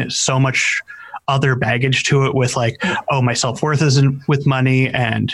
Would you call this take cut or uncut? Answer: uncut